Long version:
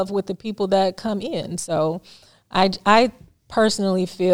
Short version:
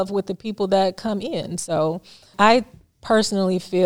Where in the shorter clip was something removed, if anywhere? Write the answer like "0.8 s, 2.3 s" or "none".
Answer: 2.3 s